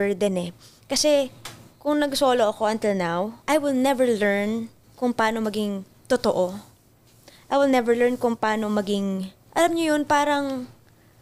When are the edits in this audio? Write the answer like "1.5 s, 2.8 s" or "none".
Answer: 3.4 s, 4.8 s, 5.9 s, 9.3 s